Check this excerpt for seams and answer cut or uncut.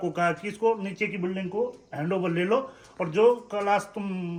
uncut